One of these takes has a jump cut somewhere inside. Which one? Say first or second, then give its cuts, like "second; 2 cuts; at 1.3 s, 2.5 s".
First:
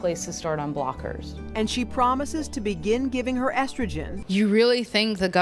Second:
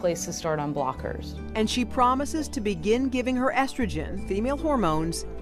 first; 1 cut; at 4.2 s